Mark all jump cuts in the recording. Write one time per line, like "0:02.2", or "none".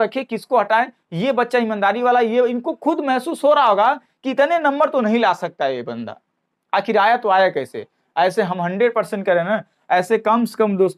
none